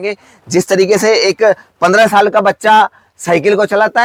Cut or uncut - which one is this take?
uncut